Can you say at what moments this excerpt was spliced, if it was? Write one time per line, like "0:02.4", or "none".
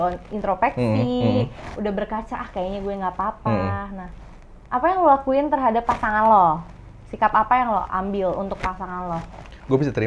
none

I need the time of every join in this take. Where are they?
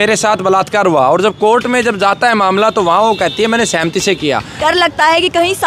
0:04.6

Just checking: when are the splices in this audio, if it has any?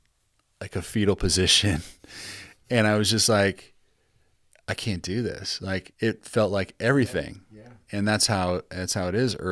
0:05.9

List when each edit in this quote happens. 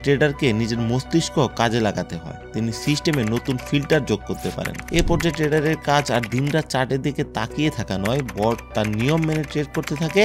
0:04.8

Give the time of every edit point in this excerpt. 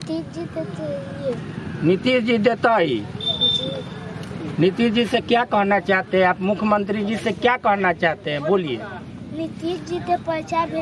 none

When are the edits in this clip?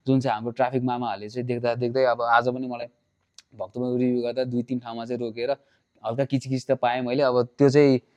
none

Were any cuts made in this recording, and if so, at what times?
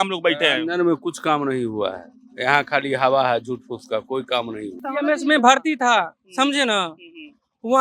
0:04.9

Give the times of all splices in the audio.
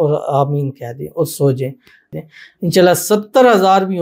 0:02.1

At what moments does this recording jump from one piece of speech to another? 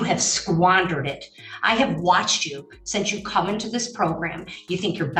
none

